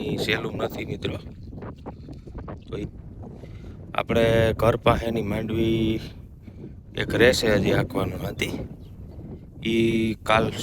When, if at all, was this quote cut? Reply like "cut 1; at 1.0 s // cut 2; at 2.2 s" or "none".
cut 1; at 2.8 s

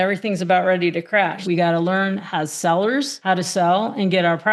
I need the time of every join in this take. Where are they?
cut 1; at 1.4 s // cut 2; at 3.1 s

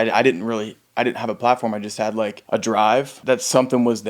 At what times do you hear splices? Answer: cut 1; at 2.4 s // cut 2; at 3.2 s

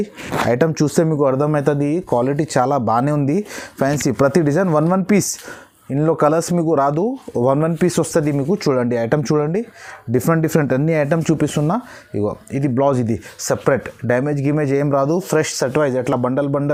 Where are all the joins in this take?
none

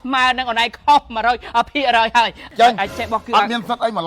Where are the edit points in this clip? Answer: cut 1; at 2.4 s

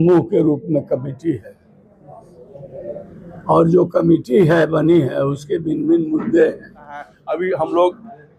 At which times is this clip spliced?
cut 1; at 7.2 s

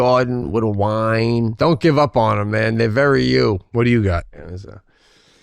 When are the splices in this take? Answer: cut 1; at 1.5 s // cut 2; at 3.7 s

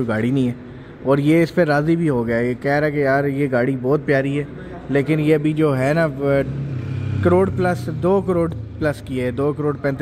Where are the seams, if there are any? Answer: none

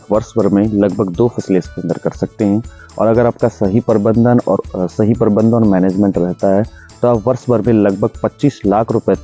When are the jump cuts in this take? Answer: none

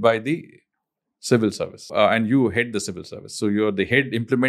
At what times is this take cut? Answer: cut 1; at 1.9 s

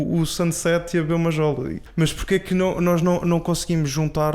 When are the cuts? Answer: cut 1; at 1.8 s

